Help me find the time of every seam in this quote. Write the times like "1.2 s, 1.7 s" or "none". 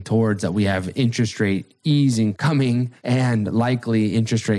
2.5 s